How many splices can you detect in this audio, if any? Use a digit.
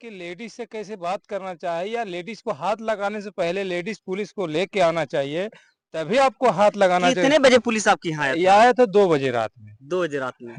0